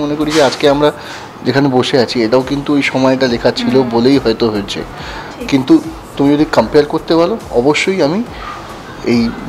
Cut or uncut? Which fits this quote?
uncut